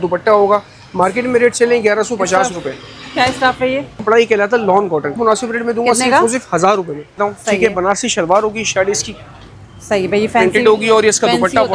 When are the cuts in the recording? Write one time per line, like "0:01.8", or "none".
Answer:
0:04.0
0:05.2
0:07.1

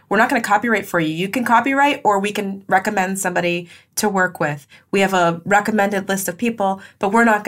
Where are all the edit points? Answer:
none

